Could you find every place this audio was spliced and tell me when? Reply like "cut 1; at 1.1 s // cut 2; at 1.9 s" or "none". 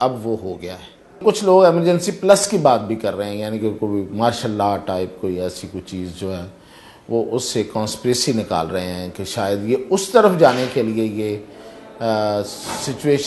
cut 1; at 1.2 s